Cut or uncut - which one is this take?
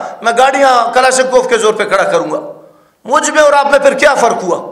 uncut